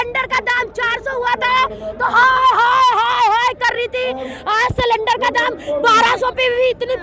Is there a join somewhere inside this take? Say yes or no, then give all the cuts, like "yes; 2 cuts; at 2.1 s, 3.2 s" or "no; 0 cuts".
no; 0 cuts